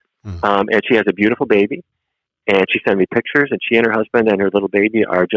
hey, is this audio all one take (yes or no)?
yes